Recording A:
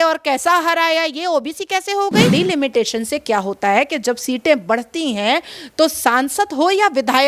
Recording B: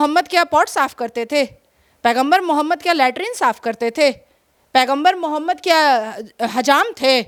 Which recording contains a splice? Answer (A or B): A